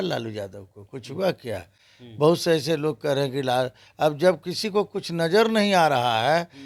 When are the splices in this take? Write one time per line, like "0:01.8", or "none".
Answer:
none